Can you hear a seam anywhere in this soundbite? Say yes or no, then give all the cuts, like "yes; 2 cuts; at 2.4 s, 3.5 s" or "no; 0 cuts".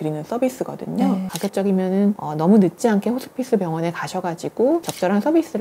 yes; 1 cut; at 1.2 s